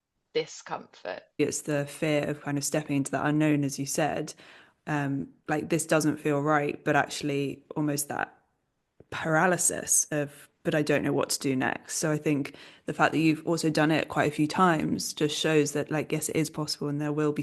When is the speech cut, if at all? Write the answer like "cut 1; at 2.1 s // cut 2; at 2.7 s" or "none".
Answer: cut 1; at 1.4 s